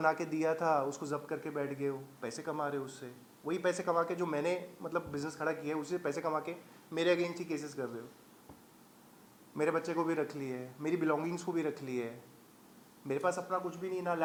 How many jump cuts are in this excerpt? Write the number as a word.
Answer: zero